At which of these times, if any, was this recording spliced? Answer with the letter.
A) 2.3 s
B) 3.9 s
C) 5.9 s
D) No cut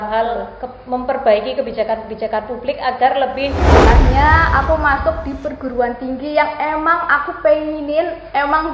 B